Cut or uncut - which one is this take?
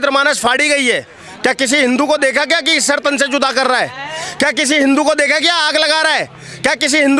uncut